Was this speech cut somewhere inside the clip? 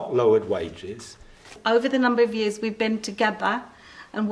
yes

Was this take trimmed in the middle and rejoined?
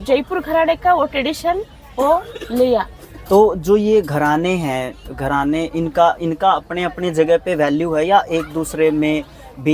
yes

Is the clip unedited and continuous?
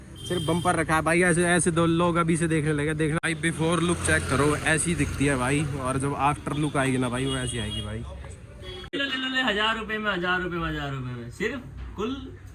no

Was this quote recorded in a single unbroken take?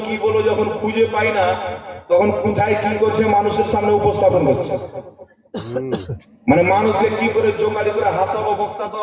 yes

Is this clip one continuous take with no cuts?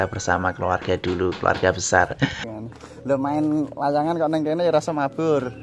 no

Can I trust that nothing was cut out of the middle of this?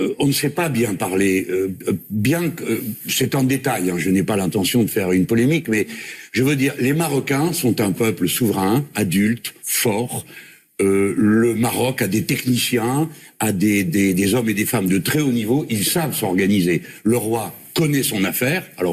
yes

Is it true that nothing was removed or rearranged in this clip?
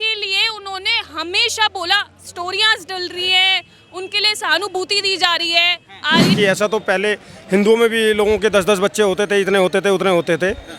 no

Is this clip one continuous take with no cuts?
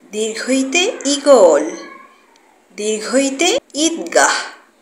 no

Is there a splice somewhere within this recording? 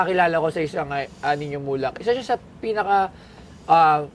no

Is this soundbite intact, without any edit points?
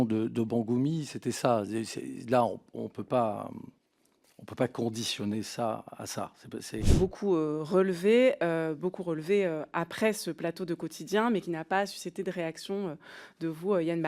no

